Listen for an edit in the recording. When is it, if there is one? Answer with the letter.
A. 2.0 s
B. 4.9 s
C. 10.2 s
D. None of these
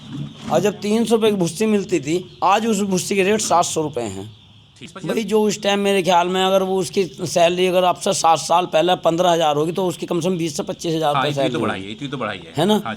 B